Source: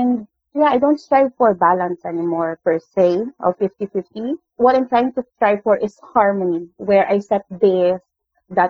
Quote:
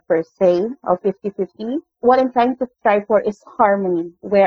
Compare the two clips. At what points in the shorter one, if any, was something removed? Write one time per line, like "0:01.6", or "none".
none